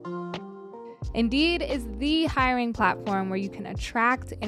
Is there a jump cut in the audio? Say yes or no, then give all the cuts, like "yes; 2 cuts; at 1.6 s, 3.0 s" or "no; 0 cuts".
yes; 1 cut; at 1.0 s